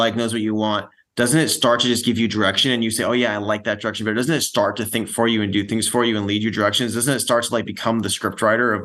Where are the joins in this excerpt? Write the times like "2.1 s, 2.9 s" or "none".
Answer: none